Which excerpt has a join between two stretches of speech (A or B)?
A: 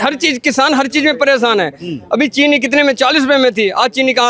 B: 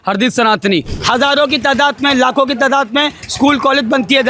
B